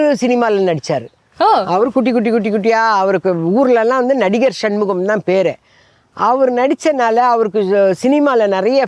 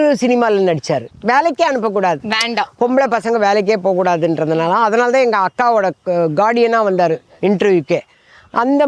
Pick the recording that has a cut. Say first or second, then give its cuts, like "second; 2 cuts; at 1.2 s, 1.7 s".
second; 1 cut; at 1.1 s